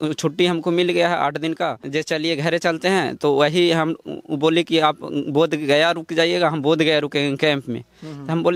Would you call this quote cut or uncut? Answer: cut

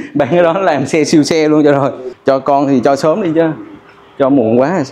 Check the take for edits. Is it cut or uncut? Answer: cut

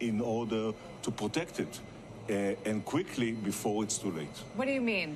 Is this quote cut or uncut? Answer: cut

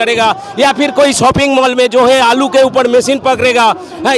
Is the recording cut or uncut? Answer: uncut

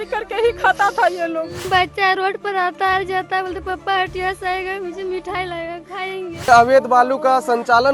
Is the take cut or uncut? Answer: cut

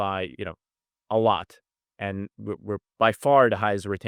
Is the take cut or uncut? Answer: uncut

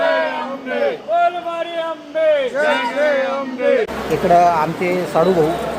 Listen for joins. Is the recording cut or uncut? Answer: cut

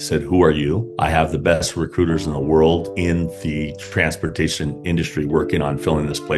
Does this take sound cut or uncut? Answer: uncut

